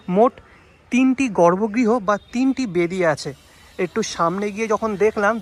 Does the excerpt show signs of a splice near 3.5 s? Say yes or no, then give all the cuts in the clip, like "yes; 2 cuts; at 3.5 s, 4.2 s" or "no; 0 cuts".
no; 0 cuts